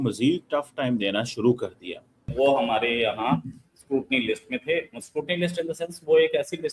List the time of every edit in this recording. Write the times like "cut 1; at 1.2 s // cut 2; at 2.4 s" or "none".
cut 1; at 2.3 s